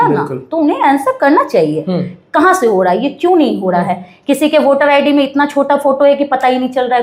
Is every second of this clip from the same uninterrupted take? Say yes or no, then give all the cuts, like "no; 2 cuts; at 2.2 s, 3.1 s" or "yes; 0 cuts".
yes; 0 cuts